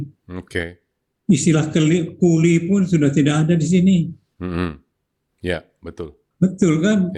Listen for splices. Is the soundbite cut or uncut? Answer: cut